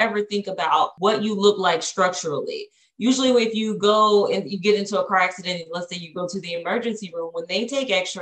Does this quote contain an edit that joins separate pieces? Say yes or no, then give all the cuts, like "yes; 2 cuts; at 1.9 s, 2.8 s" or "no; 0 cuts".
yes; 1 cut; at 0.9 s